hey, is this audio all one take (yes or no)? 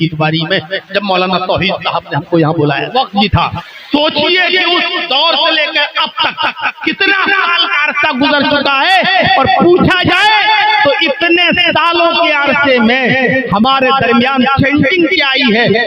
no